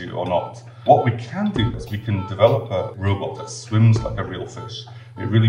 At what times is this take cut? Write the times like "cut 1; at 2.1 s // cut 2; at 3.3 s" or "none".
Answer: cut 1; at 0.8 s // cut 2; at 1.7 s // cut 3; at 3.3 s